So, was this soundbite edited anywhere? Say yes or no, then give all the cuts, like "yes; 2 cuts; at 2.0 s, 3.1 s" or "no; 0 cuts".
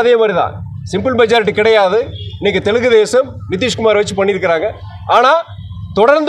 no; 0 cuts